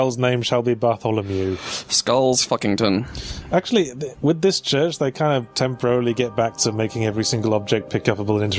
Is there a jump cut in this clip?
no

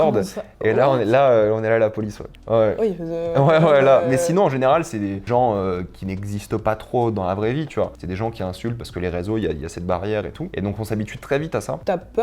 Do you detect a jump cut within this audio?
no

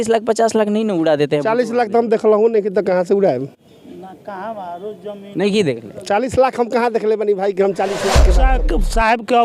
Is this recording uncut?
no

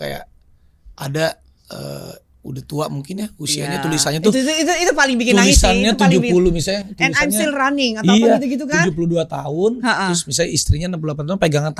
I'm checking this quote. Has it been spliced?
no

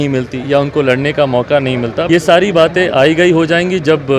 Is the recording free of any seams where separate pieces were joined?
no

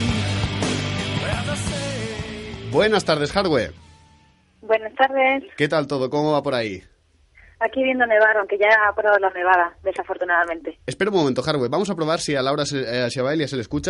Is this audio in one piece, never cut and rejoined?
no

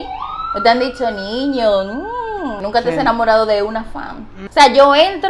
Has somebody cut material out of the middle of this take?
yes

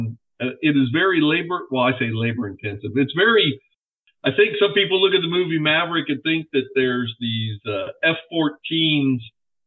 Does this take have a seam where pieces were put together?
yes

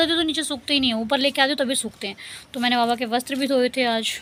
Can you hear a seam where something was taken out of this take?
no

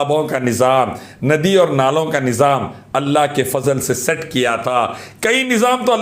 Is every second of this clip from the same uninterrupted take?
yes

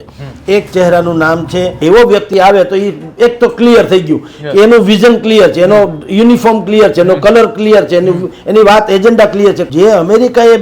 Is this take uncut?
no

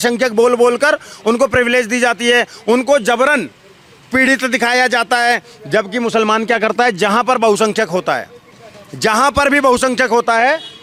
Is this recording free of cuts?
yes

